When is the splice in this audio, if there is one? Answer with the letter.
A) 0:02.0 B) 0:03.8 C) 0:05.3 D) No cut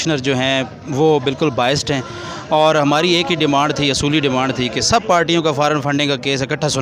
D